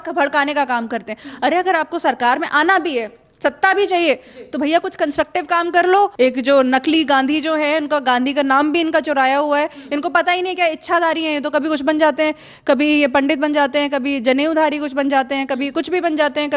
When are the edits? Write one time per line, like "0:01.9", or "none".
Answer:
0:06.1